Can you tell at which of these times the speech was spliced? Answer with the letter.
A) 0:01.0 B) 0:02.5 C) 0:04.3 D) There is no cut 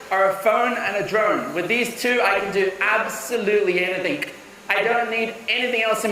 D